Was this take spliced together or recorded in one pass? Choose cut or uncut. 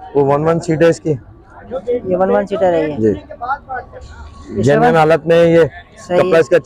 uncut